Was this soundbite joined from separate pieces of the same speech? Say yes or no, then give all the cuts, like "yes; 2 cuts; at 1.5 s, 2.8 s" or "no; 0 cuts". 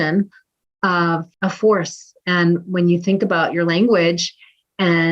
yes; 1 cut; at 0.9 s